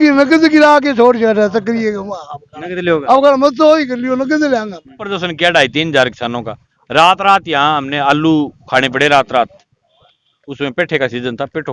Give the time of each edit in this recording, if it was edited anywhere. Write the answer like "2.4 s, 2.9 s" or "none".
5.1 s